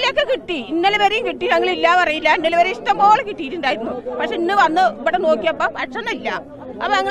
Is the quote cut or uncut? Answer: uncut